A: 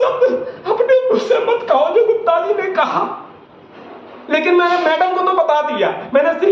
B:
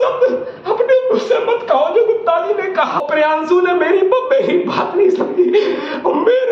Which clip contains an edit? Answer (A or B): B